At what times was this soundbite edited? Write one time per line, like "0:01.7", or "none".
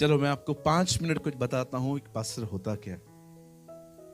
0:03.0